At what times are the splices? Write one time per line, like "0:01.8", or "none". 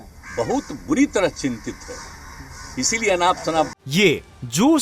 0:03.8